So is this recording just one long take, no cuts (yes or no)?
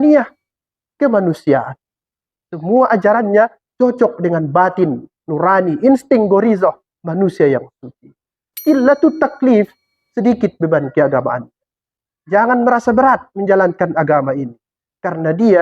no